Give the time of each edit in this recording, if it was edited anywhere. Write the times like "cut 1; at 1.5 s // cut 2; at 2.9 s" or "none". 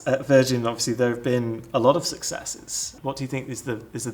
cut 1; at 2.9 s